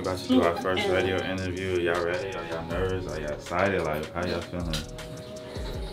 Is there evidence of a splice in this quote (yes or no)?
no